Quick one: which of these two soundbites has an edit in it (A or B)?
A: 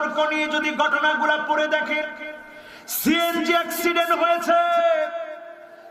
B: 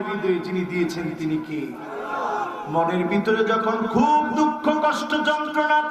B